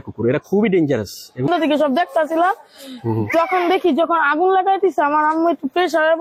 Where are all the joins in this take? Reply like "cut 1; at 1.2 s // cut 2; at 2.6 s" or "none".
cut 1; at 1.5 s